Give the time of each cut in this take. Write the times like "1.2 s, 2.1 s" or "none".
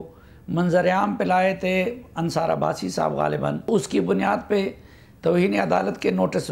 3.7 s